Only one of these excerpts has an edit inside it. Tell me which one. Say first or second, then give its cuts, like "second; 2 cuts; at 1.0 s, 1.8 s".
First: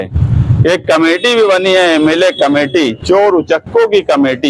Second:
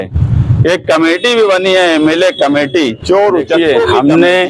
second; 1 cut; at 3.6 s